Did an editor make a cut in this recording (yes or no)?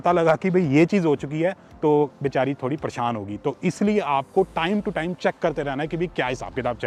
no